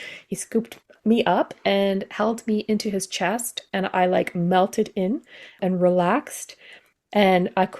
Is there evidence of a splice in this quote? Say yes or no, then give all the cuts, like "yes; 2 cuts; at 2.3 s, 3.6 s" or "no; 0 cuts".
yes; 1 cut; at 5.5 s